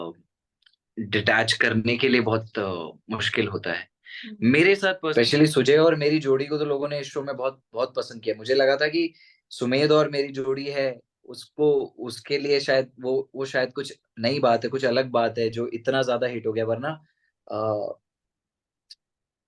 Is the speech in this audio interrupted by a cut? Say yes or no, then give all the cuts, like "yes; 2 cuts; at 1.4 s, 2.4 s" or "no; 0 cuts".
yes; 1 cut; at 5.1 s